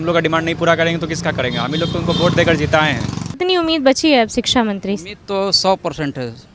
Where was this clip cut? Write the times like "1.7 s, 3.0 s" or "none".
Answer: 3.4 s

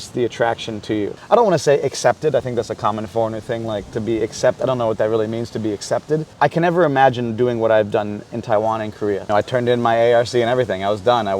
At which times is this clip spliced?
1.2 s, 6.3 s, 9.2 s

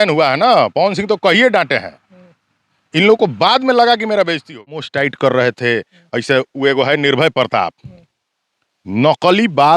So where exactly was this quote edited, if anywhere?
4.9 s

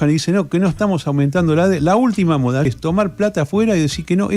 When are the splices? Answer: 2.7 s

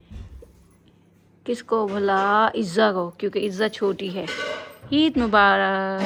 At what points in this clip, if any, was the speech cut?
none

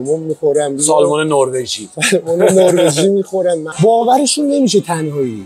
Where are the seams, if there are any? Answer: 3.7 s

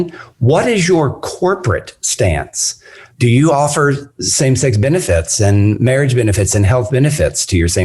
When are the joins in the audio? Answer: 3.0 s

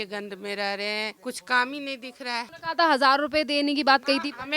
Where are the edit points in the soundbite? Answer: 1.2 s, 2.5 s

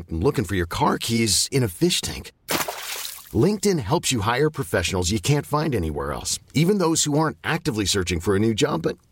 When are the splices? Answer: none

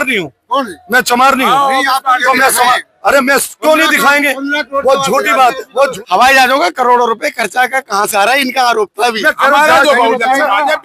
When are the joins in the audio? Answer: 5.9 s

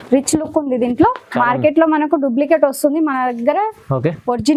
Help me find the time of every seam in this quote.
none

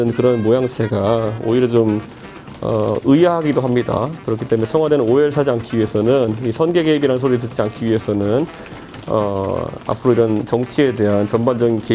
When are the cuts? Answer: none

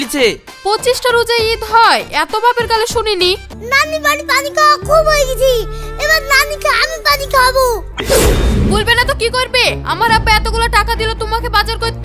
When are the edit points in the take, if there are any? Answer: 3.6 s, 7.9 s

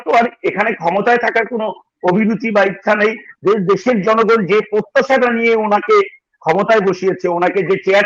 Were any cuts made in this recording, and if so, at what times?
3.3 s

